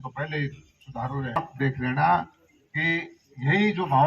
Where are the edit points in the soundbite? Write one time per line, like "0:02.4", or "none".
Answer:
0:01.5